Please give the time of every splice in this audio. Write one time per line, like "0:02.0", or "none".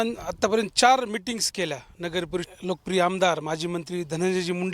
0:02.5